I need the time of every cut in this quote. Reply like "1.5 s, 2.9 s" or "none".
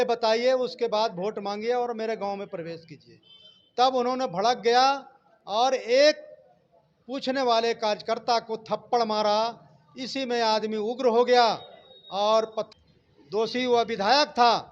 12.6 s